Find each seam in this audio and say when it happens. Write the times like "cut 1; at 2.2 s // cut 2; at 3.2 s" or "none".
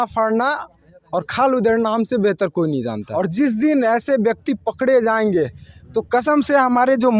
cut 1; at 3.0 s